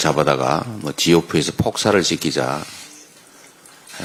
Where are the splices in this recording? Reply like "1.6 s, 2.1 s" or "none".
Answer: none